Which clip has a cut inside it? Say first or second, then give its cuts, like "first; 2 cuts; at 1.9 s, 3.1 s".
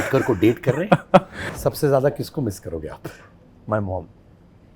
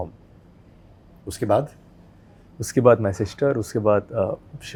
first; 1 cut; at 1.6 s